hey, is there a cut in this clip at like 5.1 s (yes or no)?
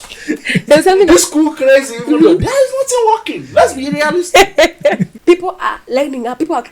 yes